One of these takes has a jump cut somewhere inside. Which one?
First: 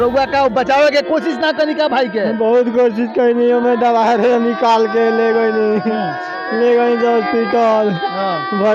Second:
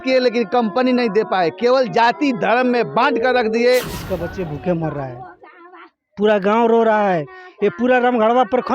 second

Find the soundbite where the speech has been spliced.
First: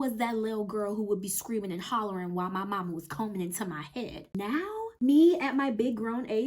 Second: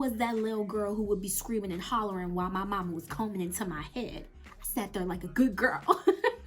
first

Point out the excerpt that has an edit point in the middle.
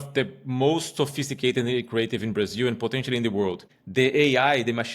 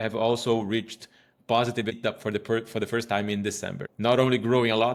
first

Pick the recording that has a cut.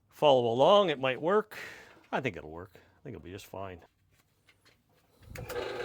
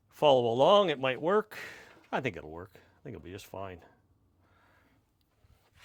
first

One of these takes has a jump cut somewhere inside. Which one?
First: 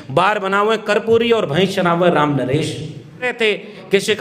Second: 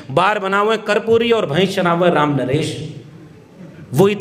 first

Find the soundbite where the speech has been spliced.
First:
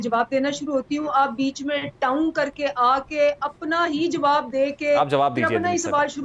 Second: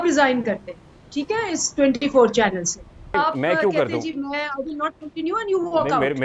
second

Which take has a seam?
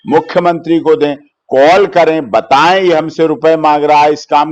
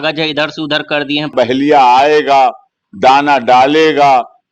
second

